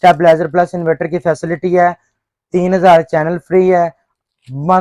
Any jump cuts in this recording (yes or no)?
no